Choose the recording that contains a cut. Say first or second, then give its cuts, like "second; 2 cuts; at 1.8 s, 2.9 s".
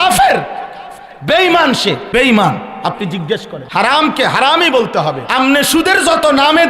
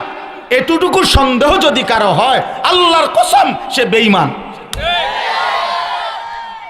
first; 3 cuts; at 2.0 s, 3.5 s, 5.2 s